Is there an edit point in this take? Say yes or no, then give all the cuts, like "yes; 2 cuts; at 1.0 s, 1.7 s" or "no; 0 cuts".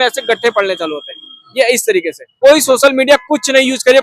yes; 1 cut; at 2.2 s